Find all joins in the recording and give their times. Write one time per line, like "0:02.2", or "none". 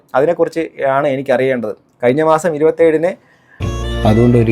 0:03.6